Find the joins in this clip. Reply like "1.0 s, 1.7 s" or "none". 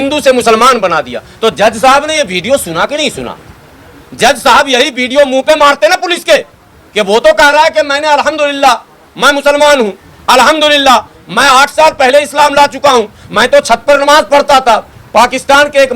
15.0 s